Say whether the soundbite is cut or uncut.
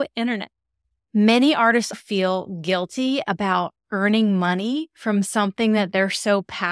cut